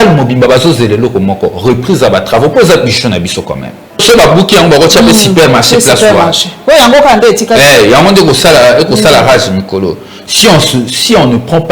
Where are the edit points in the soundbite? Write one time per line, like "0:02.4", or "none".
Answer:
0:04.0

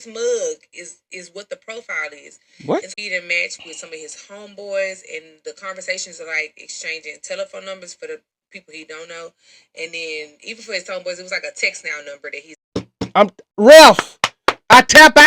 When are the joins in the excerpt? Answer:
0:02.9
0:12.6

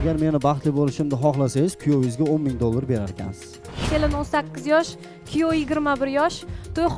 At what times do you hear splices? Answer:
0:03.8

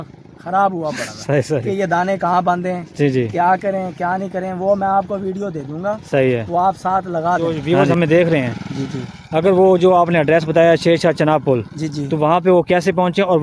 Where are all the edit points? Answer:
0:07.6

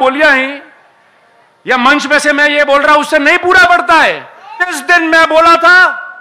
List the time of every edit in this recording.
0:04.8

